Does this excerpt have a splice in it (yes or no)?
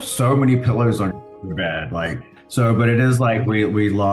yes